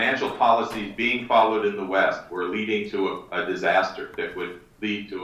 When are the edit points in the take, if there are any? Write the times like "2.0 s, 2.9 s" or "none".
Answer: 3.9 s